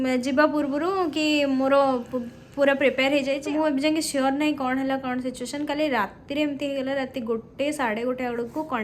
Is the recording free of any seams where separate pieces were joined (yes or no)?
no